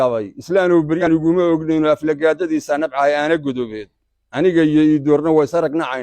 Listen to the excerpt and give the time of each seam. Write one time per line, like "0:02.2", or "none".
0:01.0